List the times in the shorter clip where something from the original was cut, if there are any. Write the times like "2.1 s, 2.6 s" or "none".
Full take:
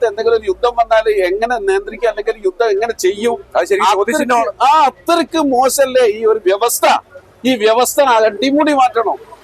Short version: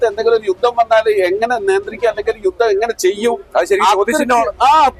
none